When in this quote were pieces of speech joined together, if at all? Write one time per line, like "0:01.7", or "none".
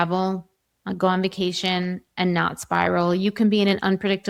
none